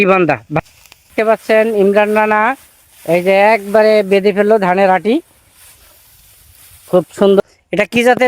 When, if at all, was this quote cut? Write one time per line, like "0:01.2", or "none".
0:01.1
0:07.4